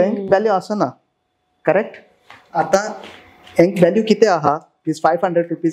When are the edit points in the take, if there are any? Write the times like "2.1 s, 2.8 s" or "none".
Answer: none